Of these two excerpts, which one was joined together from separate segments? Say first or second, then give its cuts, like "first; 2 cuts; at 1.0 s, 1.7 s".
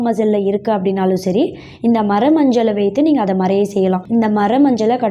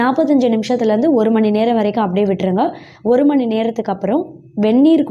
first; 1 cut; at 4.0 s